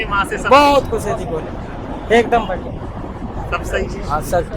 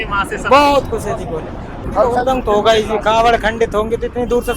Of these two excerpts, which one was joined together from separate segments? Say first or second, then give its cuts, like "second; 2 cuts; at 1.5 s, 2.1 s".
second; 1 cut; at 1.8 s